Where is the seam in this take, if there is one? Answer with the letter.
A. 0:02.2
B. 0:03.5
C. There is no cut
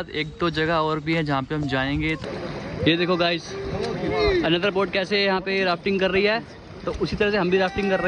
A